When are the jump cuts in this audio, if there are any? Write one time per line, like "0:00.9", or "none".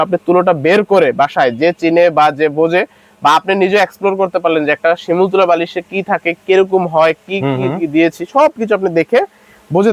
none